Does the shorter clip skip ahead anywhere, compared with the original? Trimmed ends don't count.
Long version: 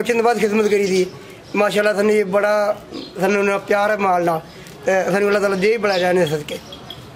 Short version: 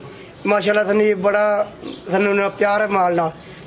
no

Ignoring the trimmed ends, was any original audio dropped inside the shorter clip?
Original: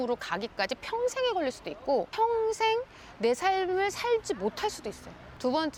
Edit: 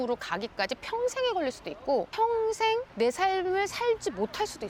yes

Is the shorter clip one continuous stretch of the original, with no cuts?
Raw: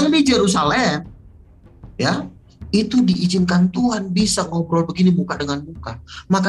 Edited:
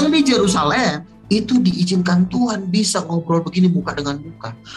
no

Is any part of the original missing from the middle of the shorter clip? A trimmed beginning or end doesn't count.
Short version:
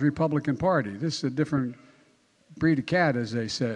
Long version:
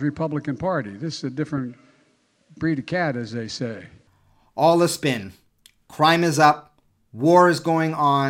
no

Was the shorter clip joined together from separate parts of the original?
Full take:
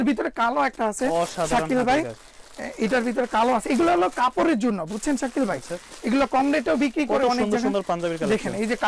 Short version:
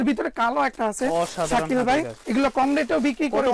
yes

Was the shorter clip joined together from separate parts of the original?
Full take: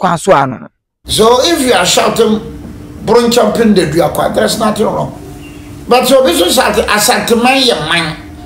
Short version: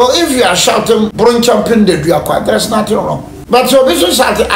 yes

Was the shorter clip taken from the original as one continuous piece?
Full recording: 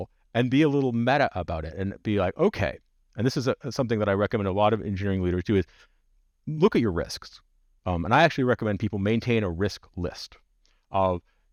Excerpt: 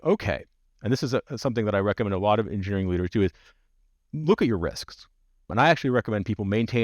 no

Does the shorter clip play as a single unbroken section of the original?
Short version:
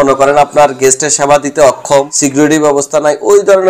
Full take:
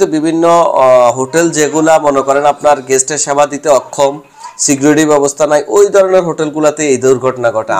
no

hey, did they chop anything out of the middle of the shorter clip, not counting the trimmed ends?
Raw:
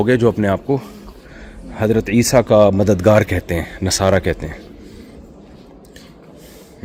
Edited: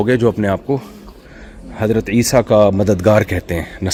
no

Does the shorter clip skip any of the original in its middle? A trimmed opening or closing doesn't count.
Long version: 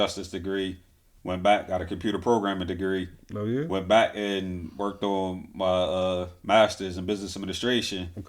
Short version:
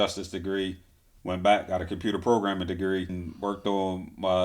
yes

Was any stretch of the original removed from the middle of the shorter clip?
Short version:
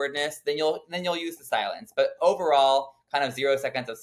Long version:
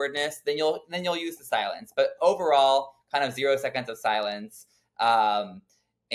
no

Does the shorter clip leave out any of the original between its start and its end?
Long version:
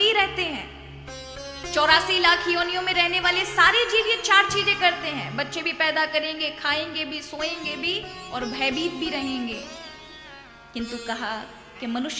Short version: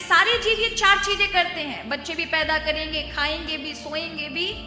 no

